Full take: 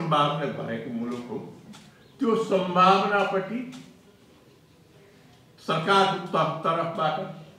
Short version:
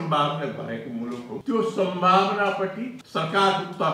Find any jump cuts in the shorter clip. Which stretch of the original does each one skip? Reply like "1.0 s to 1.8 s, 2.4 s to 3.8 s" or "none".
1.3 s to 2.1 s, 3.7 s to 5.5 s

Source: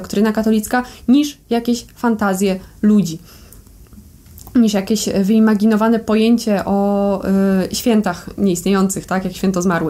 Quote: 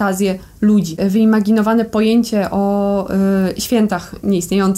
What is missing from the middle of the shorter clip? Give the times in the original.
3.1 s to 5.1 s

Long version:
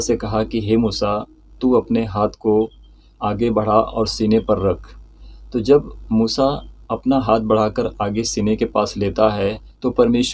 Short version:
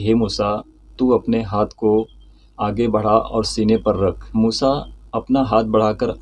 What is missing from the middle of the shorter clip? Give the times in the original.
4.9 s to 6.0 s

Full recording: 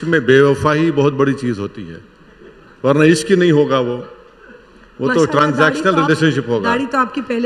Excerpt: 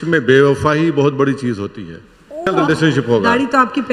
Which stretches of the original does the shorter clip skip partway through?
2.5 s to 5.9 s

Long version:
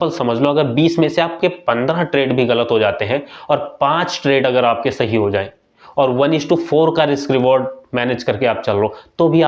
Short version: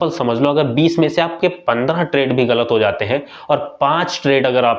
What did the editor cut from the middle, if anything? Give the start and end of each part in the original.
none

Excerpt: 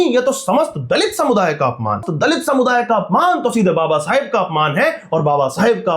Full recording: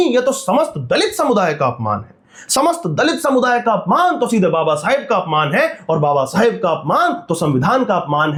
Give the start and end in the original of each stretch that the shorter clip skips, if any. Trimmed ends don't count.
2.1 s to 2.8 s

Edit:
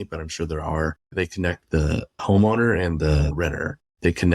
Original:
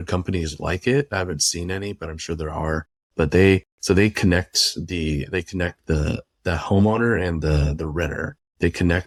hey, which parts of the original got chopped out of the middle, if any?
3.0 s to 5.3 s, 6.4 s to 6.6 s, 7.7 s to 7.9 s

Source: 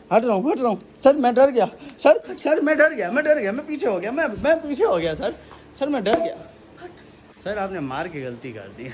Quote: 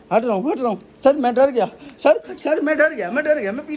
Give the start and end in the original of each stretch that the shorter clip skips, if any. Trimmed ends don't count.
none

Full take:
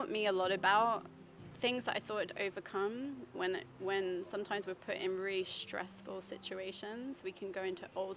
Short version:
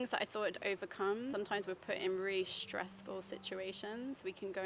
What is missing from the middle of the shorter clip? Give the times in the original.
3.0 s to 4.3 s

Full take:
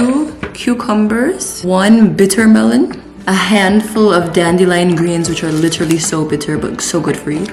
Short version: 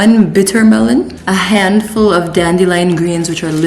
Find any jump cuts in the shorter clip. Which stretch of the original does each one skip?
3.0 s to 3.2 s

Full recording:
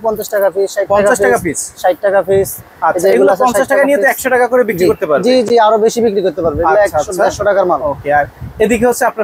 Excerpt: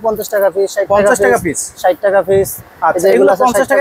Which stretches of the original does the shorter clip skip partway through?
none

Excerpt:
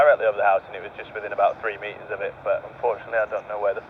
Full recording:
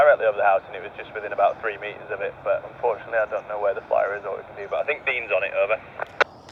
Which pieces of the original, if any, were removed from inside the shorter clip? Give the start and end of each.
none

